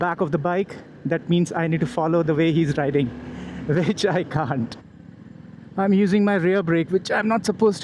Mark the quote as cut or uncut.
cut